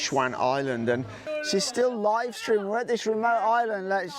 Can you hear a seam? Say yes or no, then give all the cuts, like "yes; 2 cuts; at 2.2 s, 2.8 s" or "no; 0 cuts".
yes; 1 cut; at 1.2 s